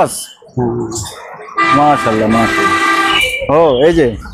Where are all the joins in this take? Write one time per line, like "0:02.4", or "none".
0:03.2